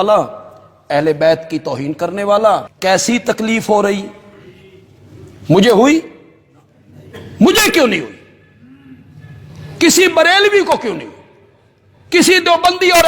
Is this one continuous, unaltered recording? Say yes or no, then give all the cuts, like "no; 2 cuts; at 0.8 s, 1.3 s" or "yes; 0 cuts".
no; 1 cut; at 2.7 s